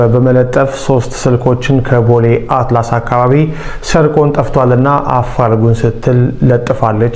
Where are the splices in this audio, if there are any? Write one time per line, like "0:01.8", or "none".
none